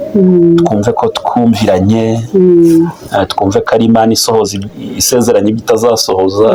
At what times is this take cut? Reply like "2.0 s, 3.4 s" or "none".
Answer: none